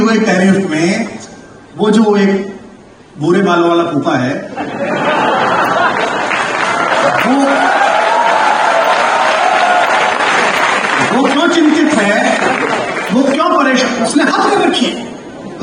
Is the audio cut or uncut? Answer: uncut